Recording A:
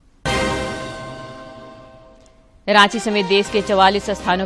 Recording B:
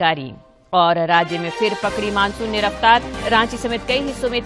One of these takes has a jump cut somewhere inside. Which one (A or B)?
A